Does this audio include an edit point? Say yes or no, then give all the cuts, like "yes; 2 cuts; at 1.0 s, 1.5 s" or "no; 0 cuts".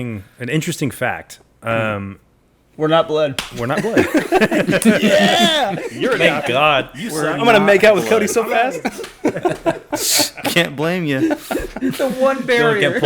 no; 0 cuts